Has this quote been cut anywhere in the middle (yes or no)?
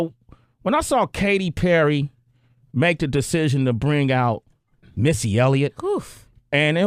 no